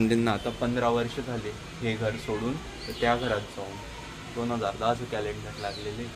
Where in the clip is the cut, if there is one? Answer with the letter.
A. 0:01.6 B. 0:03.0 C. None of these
C